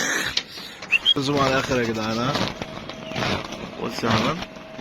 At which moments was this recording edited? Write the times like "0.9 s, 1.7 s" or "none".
1.2 s